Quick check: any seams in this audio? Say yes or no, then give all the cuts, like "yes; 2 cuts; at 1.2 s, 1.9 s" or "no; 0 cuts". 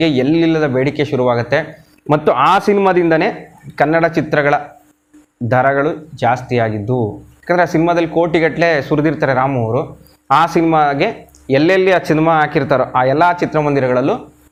no; 0 cuts